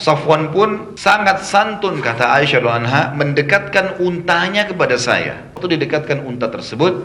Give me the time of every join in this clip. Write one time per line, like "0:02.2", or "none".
0:00.9
0:05.6